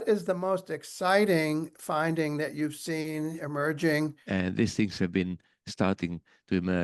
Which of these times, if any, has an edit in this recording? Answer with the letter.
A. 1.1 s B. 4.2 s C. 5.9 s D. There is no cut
B